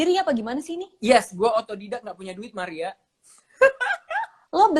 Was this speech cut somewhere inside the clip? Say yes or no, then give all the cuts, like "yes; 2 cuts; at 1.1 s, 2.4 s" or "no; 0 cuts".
no; 0 cuts